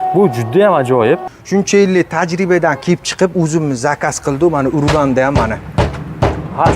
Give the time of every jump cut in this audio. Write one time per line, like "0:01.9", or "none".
0:01.3